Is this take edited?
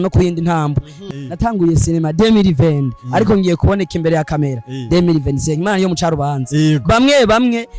yes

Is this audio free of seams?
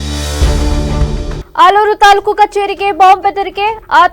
no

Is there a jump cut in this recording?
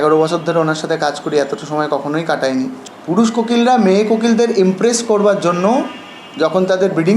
yes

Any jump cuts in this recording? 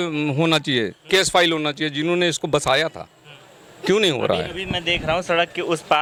no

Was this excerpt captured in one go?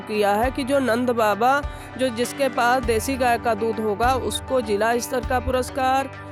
yes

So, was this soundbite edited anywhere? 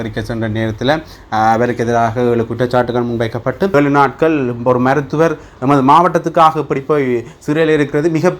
yes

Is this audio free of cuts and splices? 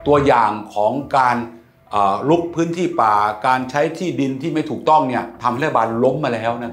yes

